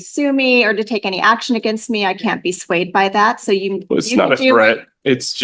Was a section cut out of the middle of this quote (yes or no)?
no